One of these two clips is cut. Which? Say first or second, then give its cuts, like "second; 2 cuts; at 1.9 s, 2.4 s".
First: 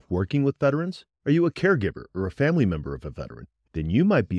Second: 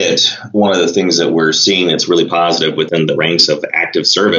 second; 1 cut; at 2.9 s